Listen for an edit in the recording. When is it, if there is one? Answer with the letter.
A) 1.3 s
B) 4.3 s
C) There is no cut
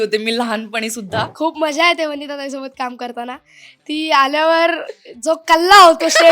A